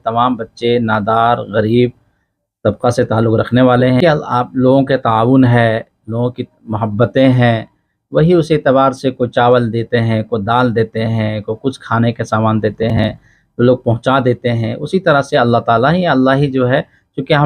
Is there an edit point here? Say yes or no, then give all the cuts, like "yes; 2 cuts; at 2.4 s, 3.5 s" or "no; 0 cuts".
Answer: yes; 1 cut; at 4.0 s